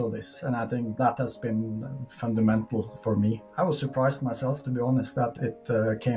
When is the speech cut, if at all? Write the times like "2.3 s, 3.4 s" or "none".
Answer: 1.0 s, 3.1 s, 5.3 s